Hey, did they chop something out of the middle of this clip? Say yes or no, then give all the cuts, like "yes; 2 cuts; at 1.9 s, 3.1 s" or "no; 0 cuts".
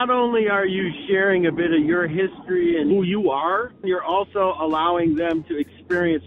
yes; 1 cut; at 3.8 s